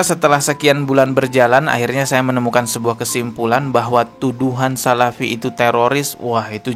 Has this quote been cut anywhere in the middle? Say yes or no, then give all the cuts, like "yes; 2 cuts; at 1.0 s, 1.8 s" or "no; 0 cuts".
no; 0 cuts